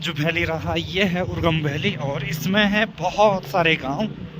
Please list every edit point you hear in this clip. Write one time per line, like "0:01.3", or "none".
none